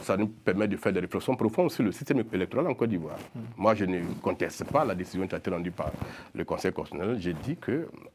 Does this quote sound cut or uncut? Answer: uncut